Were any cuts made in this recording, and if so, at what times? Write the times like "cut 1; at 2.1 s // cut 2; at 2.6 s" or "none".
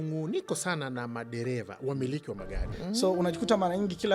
cut 1; at 2.6 s